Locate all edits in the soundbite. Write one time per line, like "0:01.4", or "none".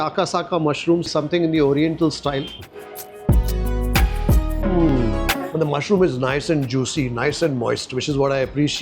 0:02.6
0:05.4